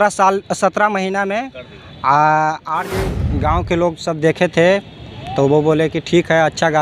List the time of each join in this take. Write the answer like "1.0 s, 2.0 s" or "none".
3.0 s